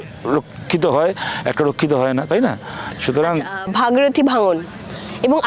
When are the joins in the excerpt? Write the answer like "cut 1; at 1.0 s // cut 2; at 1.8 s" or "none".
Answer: none